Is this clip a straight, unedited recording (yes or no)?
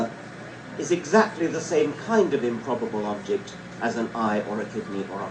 yes